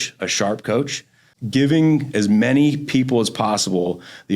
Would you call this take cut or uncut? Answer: cut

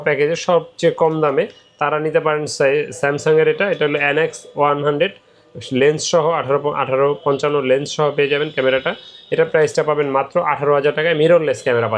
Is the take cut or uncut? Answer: uncut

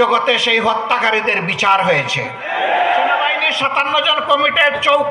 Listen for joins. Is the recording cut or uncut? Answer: cut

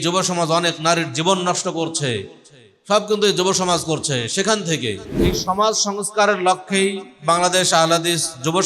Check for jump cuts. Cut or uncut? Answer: cut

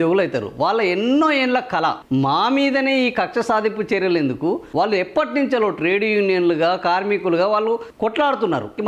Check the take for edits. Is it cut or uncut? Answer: cut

